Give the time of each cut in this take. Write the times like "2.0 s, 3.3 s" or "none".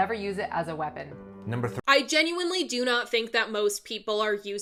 none